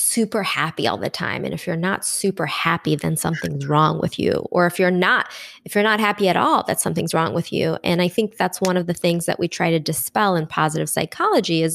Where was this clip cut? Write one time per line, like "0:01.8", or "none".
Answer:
none